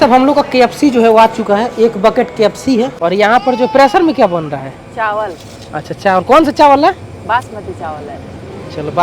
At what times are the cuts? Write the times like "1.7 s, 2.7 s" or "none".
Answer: 2.9 s

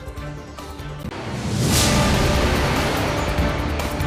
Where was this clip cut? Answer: none

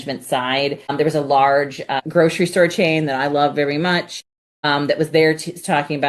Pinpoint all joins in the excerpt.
none

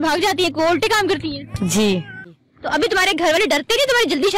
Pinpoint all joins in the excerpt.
2.4 s

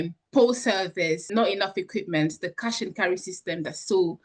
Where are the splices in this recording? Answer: none

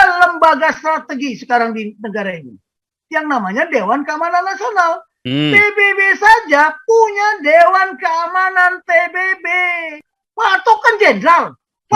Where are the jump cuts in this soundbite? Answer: 10.1 s

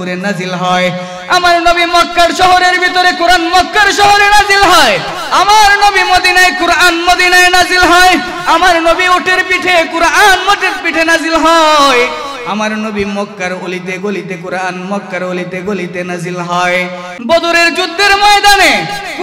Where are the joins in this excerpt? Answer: 17.1 s

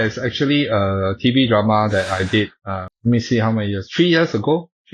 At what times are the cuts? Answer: none

